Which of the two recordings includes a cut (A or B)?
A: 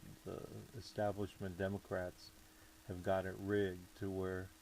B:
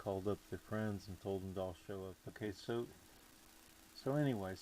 B